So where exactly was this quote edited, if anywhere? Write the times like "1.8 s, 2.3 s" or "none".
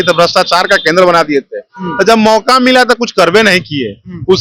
none